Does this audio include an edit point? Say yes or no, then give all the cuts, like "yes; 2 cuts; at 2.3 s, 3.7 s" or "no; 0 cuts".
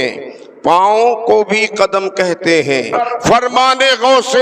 yes; 1 cut; at 2.9 s